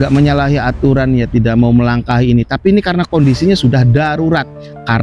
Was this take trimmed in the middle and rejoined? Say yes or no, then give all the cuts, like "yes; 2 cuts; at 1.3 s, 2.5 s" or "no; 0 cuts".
no; 0 cuts